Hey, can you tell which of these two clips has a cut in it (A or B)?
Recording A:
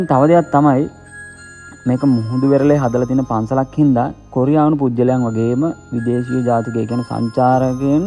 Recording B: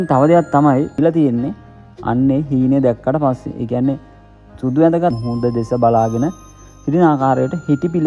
B